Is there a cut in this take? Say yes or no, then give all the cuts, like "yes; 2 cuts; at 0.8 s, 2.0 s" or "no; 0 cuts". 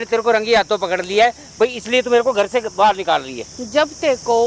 no; 0 cuts